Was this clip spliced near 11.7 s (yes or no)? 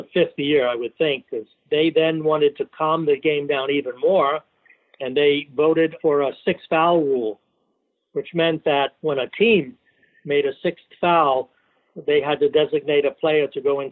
no